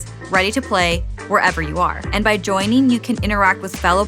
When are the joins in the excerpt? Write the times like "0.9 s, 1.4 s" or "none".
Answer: 2.0 s

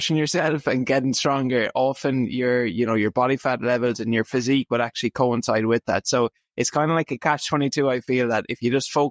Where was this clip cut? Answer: none

